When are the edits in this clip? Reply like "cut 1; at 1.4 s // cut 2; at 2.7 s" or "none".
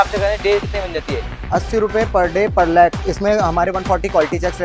cut 1; at 3.1 s

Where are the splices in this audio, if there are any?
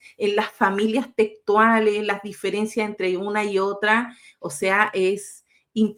none

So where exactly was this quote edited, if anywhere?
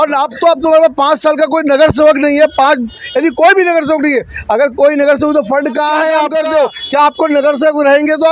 cut 1; at 6.3 s

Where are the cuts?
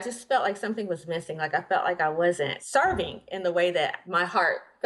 cut 1; at 2.6 s // cut 2; at 4.0 s

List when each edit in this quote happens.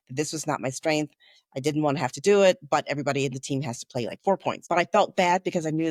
none

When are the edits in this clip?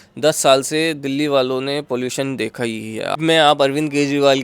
cut 1; at 3.2 s

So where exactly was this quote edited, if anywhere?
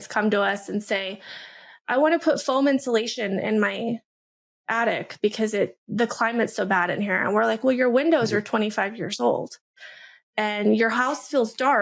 none

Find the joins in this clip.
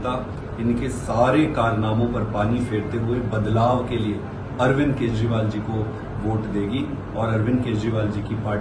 none

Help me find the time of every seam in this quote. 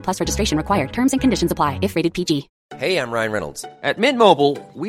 cut 1; at 2.6 s

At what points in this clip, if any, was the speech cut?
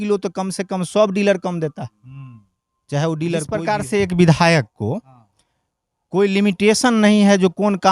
cut 1; at 3.6 s

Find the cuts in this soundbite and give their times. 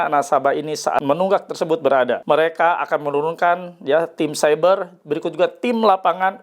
cut 1; at 1.0 s // cut 2; at 2.2 s

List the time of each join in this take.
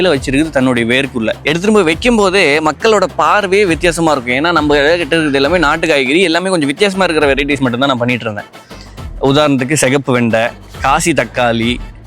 cut 1; at 1.4 s

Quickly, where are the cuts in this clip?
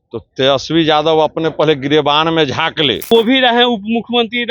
cut 1; at 3.1 s

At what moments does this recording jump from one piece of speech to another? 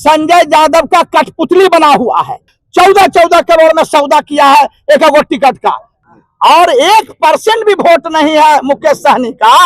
cut 1; at 2.6 s // cut 2; at 5.9 s

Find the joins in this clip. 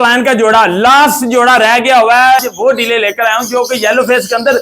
cut 1; at 2.5 s

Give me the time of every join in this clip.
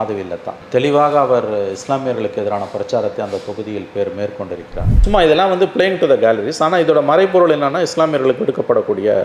cut 1; at 4.9 s

